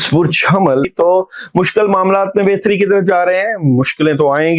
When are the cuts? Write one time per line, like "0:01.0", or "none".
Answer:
0:00.9